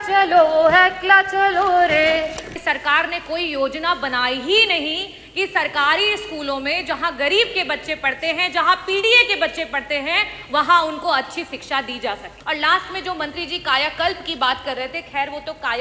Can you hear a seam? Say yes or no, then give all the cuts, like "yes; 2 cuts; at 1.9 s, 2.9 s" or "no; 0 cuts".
yes; 2 cuts; at 2.6 s, 12.3 s